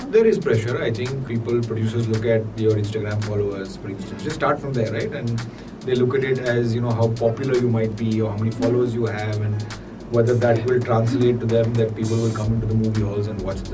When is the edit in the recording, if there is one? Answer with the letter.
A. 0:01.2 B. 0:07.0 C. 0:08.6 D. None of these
A